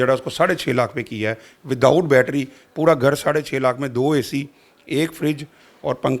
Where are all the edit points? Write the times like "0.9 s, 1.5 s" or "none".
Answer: none